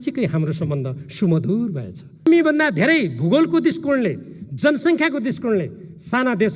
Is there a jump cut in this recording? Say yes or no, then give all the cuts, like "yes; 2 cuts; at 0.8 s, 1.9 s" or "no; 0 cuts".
yes; 1 cut; at 2.2 s